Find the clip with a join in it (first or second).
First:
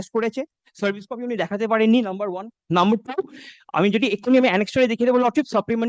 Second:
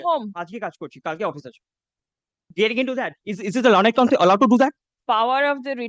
second